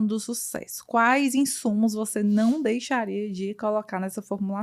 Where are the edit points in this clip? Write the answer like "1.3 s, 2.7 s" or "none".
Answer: none